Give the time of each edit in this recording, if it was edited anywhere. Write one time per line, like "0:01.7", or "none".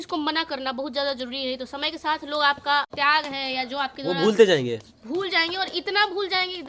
0:02.9